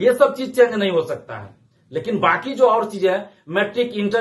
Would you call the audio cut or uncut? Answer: uncut